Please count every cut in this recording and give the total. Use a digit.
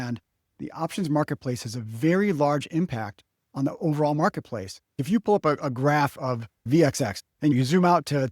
3